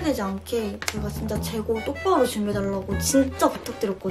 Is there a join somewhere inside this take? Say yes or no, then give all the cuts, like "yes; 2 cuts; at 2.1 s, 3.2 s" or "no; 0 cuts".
no; 0 cuts